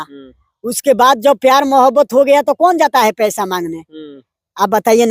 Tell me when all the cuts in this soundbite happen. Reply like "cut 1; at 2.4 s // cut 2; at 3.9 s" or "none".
none